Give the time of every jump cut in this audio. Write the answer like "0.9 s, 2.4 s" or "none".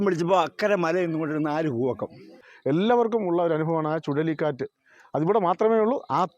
2.5 s